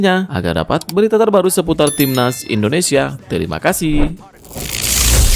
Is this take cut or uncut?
uncut